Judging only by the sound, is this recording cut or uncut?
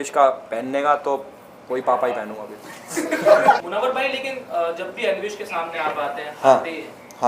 cut